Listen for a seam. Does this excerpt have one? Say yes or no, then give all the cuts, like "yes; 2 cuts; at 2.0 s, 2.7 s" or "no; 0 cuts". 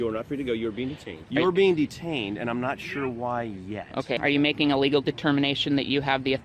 yes; 2 cuts; at 1.2 s, 4.2 s